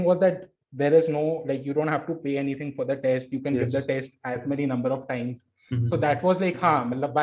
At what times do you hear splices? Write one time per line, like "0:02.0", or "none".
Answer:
none